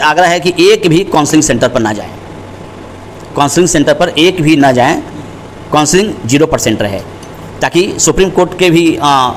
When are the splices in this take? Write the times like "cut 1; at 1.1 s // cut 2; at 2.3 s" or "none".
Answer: none